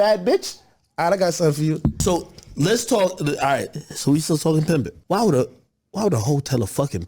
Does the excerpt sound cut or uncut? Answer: cut